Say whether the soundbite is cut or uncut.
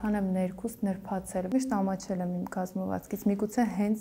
cut